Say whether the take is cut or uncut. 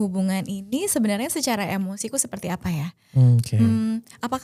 uncut